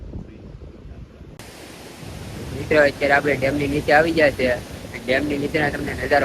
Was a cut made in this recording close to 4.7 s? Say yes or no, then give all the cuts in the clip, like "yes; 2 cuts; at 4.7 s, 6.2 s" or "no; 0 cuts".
no; 1 cut; at 1.4 s